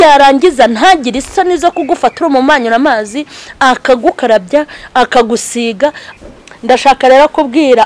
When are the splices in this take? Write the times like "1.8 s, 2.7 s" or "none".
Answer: 6.0 s